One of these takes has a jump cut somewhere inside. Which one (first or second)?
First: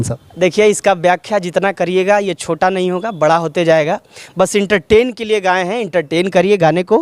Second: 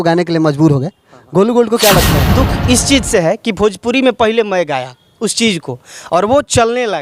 second